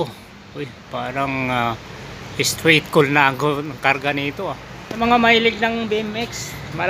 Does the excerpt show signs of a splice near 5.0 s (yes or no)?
yes